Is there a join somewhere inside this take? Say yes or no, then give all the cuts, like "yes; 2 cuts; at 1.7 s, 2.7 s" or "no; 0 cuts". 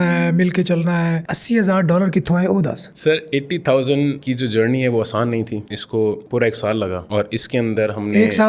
no; 0 cuts